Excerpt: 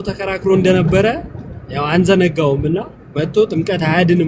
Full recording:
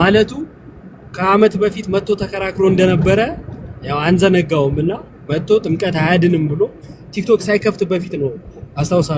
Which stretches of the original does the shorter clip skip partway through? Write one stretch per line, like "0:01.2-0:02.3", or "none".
none